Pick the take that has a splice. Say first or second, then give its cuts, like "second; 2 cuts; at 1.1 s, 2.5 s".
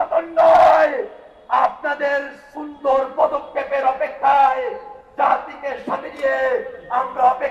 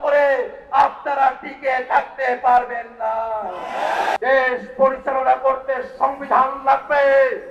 second; 1 cut; at 4.2 s